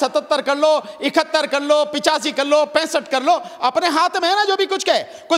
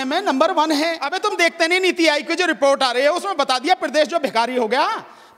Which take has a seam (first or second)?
second